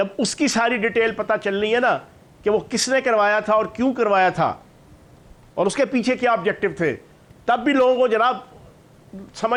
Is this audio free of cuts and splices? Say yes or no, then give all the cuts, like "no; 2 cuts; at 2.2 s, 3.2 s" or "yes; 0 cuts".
yes; 0 cuts